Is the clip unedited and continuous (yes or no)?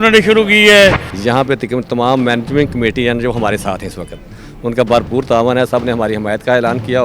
no